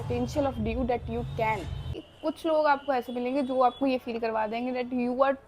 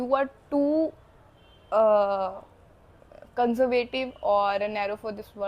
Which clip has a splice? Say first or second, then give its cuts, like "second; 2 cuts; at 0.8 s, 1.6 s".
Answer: first; 1 cut; at 2.1 s